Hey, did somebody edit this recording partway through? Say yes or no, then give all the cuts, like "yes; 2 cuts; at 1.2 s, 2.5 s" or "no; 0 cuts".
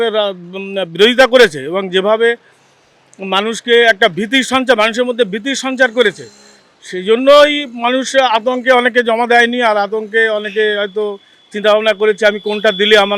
no; 0 cuts